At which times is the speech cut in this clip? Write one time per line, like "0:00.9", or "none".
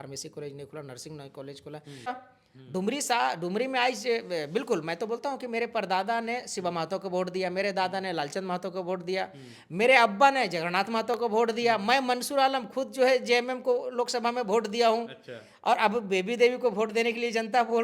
0:02.1